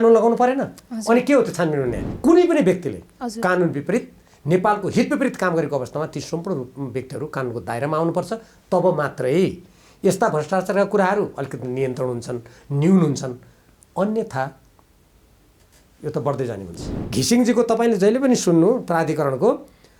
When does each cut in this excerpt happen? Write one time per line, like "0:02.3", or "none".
0:02.0
0:17.0